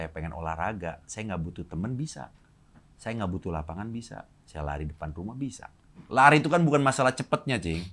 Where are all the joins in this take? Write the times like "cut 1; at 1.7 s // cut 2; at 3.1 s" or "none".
cut 1; at 6.0 s